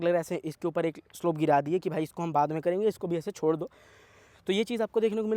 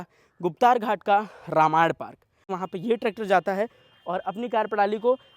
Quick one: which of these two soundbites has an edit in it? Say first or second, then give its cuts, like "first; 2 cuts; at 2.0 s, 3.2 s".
second; 1 cut; at 2.6 s